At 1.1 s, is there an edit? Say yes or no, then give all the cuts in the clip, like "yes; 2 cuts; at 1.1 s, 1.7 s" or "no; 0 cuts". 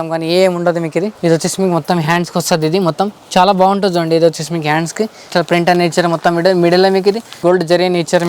yes; 3 cuts; at 1.1 s, 5.3 s, 7.3 s